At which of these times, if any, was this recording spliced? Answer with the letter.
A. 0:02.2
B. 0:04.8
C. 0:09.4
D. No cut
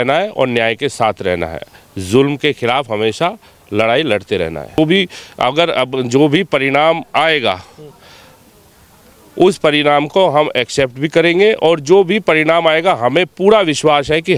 B